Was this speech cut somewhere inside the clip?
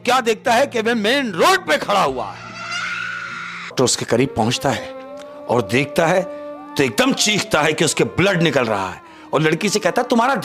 yes; 1 cut; at 3.7 s

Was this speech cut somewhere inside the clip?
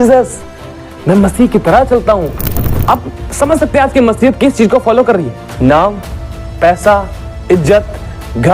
yes; 2 cuts; at 2.7 s, 5.4 s

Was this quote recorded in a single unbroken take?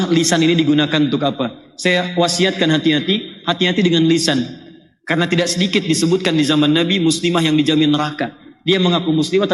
yes; 0 cuts

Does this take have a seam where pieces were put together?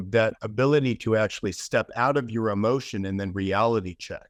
no; 0 cuts

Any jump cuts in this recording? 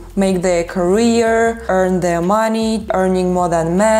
yes; 2 cuts; at 1.6 s, 2.9 s

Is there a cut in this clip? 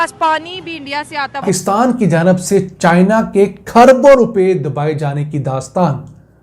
yes; 1 cut; at 1.4 s

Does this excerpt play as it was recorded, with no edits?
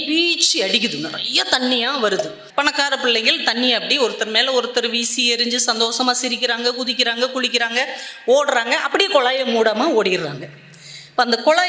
no; 1 cut; at 2.4 s

